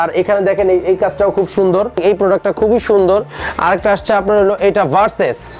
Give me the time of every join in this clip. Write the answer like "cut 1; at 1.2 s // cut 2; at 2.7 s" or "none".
cut 1; at 2.0 s